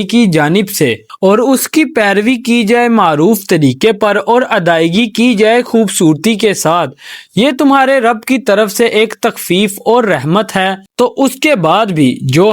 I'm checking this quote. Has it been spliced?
yes; 2 cuts; at 1.0 s, 10.8 s

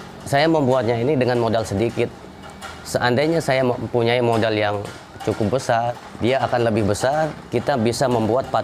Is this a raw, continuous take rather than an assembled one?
no; 2 cuts; at 6.0 s, 7.4 s

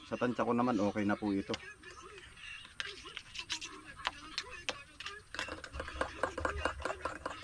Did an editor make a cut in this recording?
no; 0 cuts

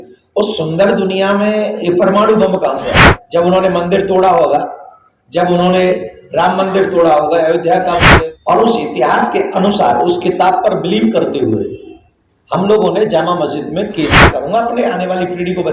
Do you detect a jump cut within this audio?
yes; 3 cuts; at 3.1 s, 8.1 s, 14.3 s

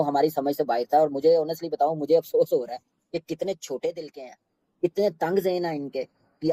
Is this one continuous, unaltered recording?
yes; 0 cuts

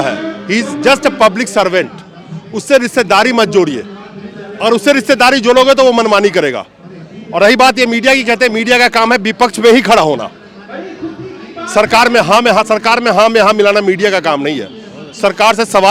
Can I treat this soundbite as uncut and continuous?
yes; 0 cuts

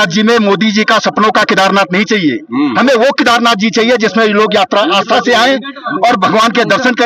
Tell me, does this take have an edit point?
no; 0 cuts

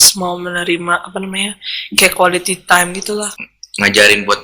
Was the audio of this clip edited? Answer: yes; 1 cut; at 3.3 s

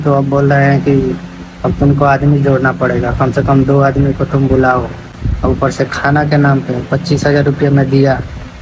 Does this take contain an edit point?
yes; 1 cut; at 4.7 s

